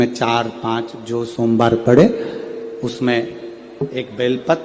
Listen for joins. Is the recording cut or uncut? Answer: uncut